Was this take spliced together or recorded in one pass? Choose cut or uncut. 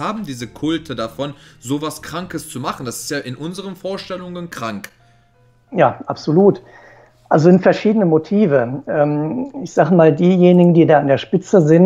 uncut